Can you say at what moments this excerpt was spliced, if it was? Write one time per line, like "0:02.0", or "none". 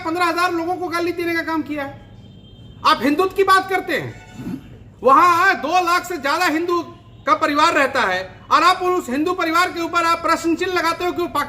0:01.7